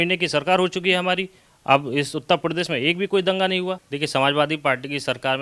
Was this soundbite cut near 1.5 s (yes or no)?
no